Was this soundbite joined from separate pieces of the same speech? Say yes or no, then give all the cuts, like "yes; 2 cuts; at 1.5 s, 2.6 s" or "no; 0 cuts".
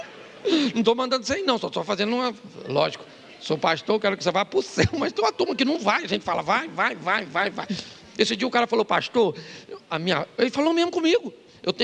no; 0 cuts